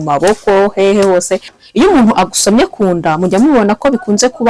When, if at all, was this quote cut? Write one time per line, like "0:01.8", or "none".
0:01.6

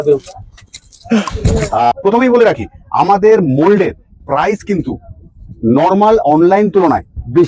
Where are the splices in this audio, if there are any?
0:01.9

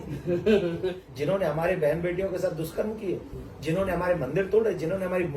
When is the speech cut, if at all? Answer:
0:01.0

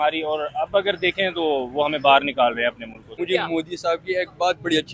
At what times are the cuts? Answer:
0:03.1

